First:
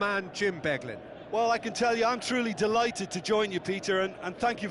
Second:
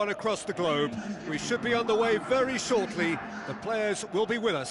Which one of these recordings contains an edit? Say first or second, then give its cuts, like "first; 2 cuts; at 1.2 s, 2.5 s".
first; 1 cut; at 1.1 s